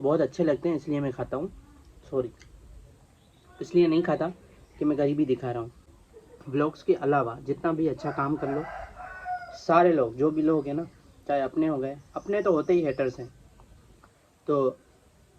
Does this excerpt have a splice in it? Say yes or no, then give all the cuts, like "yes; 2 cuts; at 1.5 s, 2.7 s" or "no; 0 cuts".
yes; 1 cut; at 6.0 s